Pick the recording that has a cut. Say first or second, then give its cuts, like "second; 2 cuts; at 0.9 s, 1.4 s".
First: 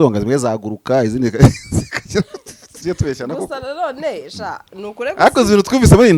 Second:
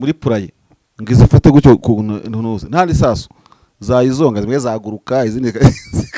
first; 1 cut; at 2.8 s